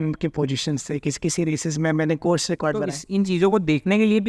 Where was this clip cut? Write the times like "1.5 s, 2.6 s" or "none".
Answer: 3.0 s